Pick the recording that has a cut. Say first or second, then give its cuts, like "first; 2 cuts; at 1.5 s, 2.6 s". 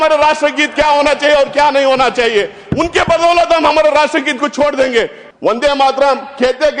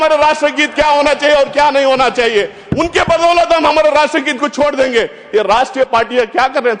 first; 1 cut; at 5.2 s